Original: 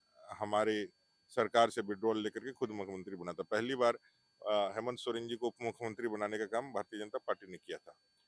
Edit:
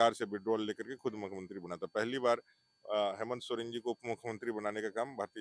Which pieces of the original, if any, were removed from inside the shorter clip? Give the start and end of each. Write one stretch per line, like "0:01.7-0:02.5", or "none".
none